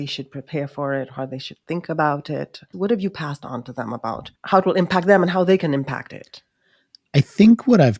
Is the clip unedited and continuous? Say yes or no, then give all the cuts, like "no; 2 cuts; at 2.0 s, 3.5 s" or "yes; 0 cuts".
no; 2 cuts; at 2.7 s, 4.3 s